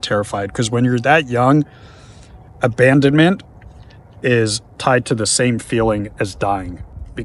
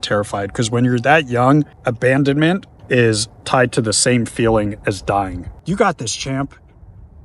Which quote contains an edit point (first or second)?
second